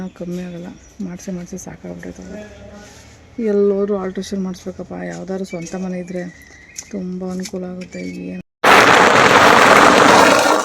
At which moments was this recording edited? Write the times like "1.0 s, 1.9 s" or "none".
8.4 s

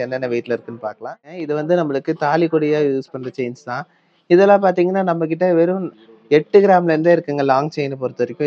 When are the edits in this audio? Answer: 1.2 s

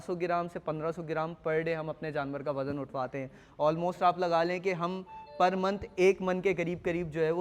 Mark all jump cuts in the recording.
none

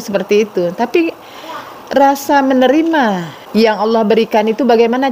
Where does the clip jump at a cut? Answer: 3.3 s

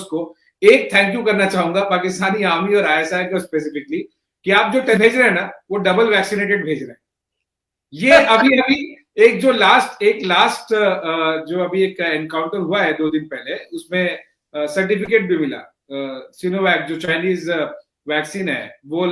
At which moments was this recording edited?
none

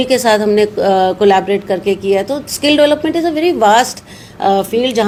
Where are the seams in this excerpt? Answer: none

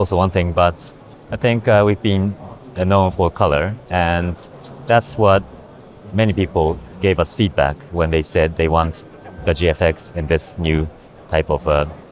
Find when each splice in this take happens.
none

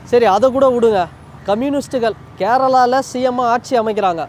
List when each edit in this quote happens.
none

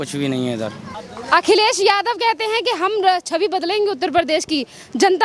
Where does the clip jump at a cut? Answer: 1.0 s

